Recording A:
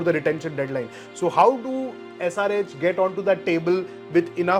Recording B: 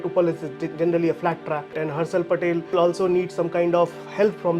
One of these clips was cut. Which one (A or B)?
B